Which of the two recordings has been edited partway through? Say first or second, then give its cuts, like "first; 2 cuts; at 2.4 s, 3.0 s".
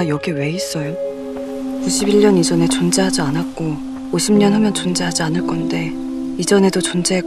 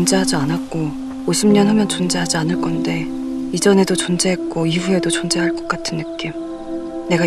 first; 1 cut; at 1.3 s